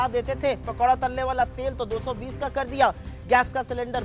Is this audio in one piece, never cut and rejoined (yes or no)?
yes